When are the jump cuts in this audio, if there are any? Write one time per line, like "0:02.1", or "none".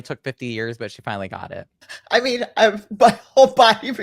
0:01.9